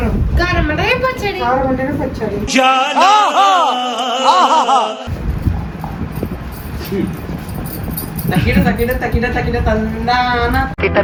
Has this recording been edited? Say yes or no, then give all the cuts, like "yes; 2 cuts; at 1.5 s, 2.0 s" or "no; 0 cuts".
no; 0 cuts